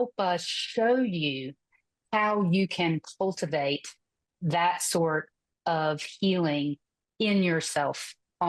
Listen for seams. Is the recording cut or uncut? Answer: cut